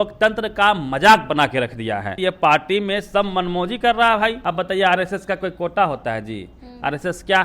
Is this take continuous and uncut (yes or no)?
no